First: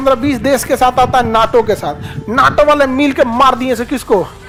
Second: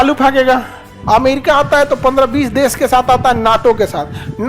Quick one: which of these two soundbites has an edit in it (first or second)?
second